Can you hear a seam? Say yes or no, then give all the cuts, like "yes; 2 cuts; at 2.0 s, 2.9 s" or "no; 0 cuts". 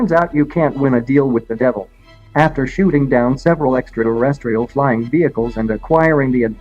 yes; 1 cut; at 1.9 s